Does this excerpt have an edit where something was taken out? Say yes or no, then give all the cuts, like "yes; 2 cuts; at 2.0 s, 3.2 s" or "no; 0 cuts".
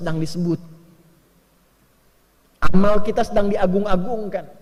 no; 0 cuts